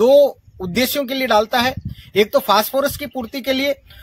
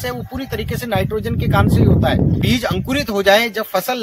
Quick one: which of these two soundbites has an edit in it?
second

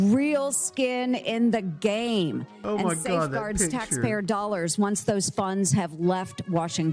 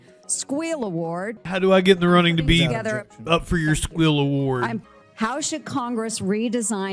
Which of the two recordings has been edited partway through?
second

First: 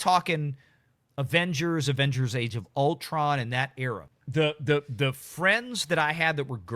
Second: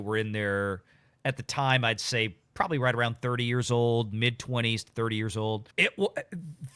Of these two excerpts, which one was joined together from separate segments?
first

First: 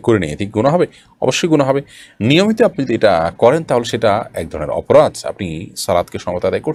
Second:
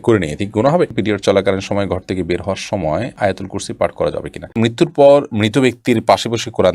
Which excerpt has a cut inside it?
second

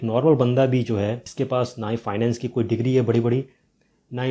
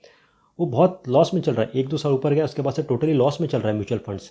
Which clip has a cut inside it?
first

